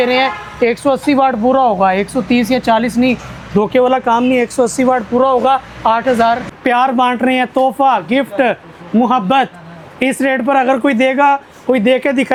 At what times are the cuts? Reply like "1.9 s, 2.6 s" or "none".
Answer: none